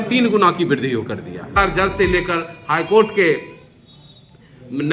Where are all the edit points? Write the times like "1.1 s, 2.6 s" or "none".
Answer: 1.6 s

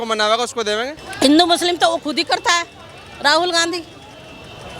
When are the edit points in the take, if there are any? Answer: 1.0 s

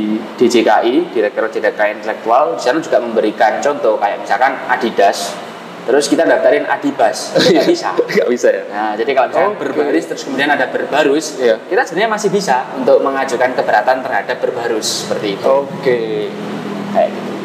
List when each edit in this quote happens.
none

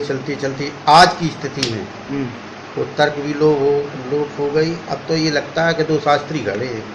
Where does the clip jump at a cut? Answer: none

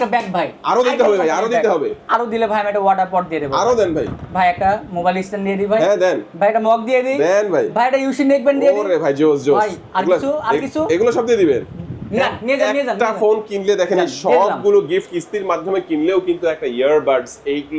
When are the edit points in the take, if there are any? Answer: none

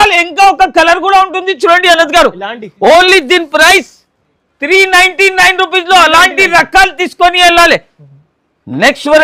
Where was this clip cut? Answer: none

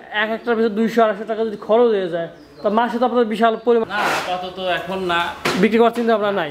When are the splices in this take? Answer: 3.8 s

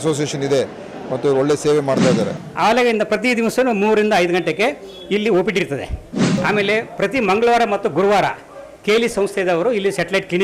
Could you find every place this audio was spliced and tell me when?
2.4 s

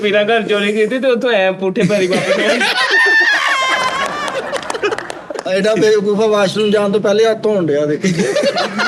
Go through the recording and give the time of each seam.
5.4 s

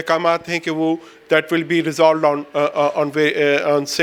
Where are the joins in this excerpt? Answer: none

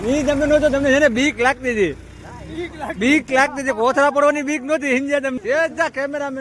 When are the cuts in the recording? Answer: 5.4 s

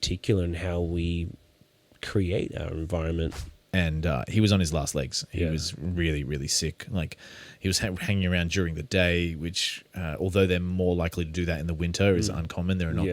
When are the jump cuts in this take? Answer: 3.5 s

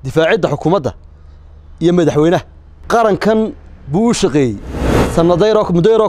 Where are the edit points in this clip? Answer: 2.7 s, 5.0 s

